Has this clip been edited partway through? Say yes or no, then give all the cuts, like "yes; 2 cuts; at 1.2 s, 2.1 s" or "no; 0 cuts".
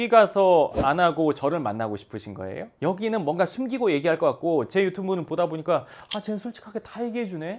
yes; 1 cut; at 2.7 s